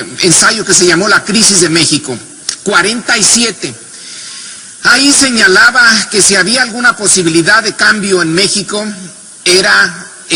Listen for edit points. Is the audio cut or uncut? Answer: uncut